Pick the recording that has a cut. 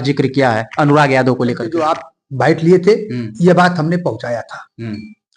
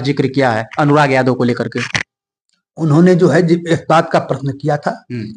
first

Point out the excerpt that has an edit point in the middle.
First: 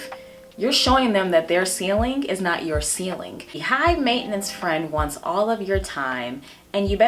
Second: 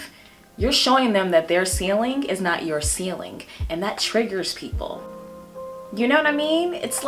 first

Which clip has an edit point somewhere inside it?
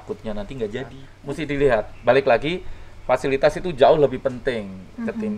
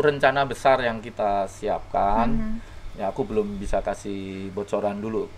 first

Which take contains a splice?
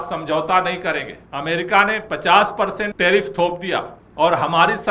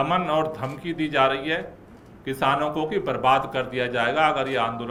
first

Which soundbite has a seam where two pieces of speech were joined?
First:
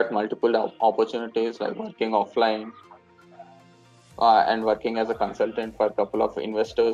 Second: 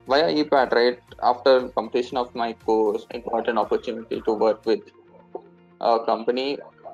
second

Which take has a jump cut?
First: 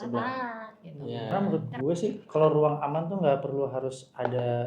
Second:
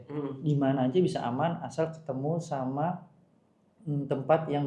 first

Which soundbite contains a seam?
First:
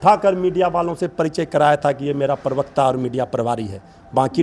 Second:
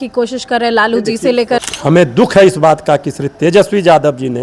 second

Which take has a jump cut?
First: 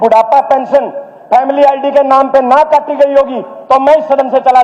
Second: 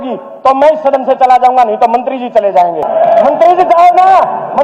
second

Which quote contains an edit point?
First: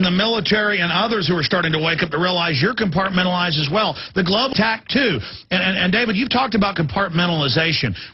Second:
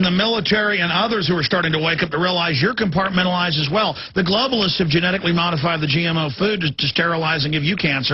second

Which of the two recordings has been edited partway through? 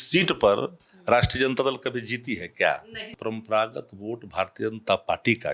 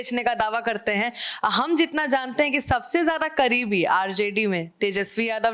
first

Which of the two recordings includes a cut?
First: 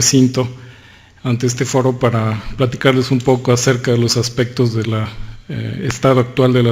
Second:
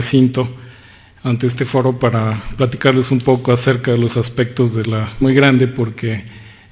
first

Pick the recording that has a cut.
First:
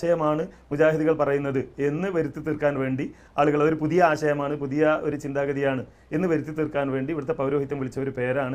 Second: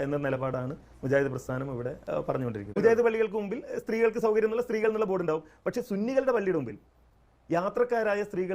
second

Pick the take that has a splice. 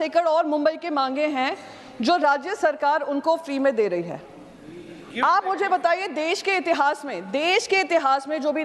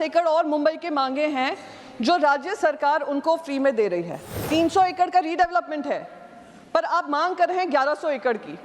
second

